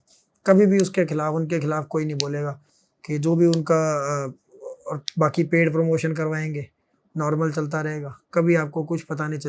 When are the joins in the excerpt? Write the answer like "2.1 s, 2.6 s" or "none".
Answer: none